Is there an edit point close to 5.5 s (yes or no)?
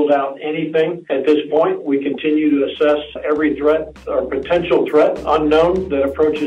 no